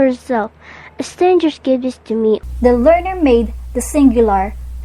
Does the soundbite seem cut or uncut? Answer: uncut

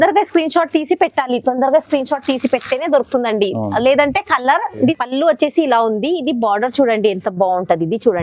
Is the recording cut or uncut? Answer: cut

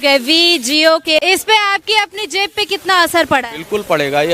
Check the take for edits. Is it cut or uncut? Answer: cut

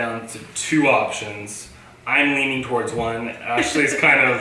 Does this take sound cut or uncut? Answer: uncut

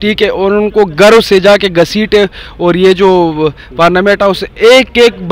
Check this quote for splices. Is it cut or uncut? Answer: uncut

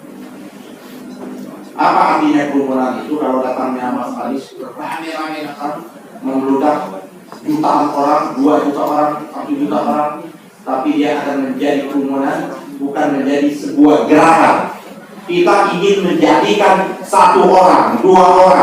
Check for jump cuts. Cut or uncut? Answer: uncut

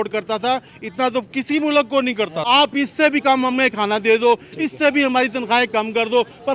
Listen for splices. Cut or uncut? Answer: cut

